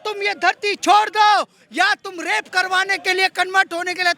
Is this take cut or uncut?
uncut